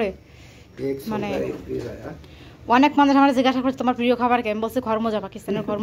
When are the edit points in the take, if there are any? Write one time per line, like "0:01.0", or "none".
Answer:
none